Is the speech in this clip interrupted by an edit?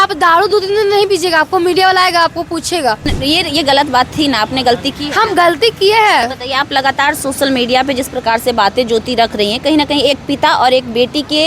yes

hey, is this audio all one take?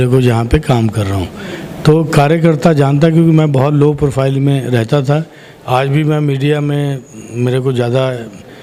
yes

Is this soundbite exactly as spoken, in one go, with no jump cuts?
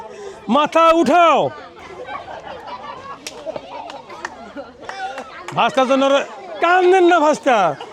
no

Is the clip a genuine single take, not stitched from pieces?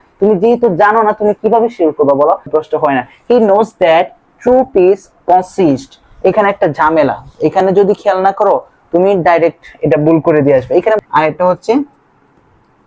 no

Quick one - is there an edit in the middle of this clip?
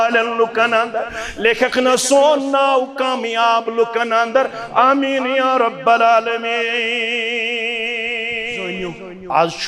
yes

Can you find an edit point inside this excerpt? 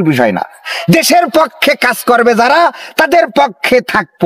no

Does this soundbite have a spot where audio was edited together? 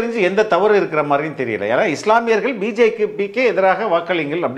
no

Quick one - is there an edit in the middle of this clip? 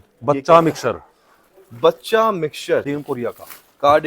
yes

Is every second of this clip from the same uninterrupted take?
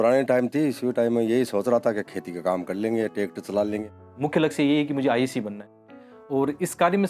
no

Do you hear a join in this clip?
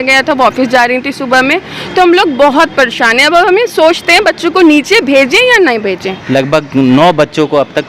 yes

